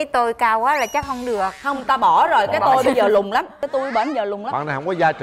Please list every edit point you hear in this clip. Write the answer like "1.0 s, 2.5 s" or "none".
none